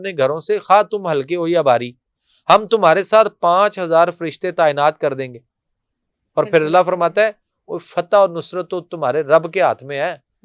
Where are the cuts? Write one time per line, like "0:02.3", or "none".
none